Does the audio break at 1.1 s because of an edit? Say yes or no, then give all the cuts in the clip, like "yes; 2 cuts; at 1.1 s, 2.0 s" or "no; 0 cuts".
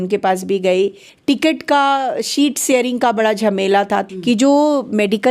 yes; 2 cuts; at 1.1 s, 4.1 s